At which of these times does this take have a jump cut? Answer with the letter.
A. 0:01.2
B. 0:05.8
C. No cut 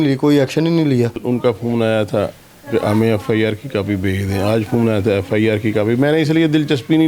A